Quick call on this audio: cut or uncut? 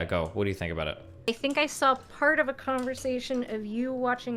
cut